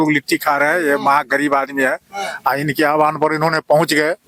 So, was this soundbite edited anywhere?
no; 0 cuts

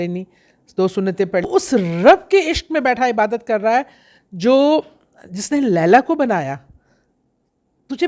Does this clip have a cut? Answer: yes; 1 cut; at 1.5 s

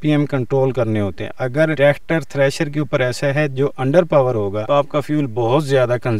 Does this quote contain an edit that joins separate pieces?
yes; 2 cuts; at 1.7 s, 4.6 s

